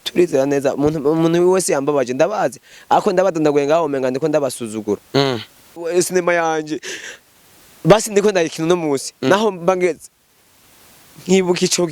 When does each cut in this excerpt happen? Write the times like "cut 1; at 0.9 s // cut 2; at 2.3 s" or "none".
cut 1; at 5.8 s

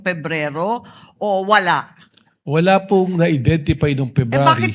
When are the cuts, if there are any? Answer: none

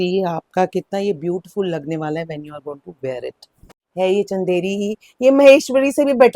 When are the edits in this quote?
cut 1; at 3.8 s

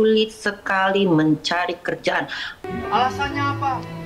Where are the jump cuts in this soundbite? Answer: cut 1; at 2.6 s

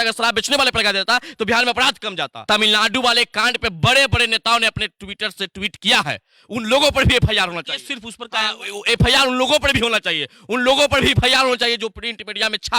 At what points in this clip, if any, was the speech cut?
cut 1; at 2.4 s

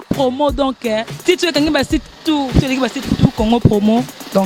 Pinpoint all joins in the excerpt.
none

